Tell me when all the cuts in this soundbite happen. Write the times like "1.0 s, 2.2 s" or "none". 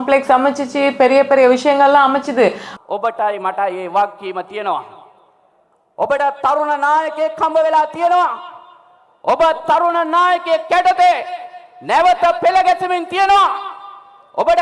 2.7 s